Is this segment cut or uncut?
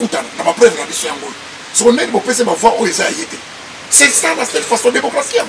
uncut